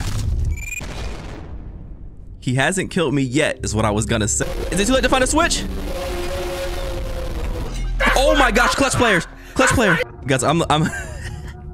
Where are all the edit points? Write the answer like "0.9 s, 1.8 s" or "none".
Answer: 4.4 s, 10.1 s